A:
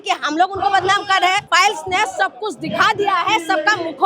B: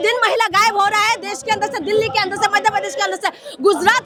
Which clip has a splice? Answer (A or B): A